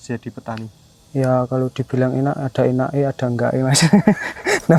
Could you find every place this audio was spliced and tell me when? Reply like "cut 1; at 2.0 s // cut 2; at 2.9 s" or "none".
none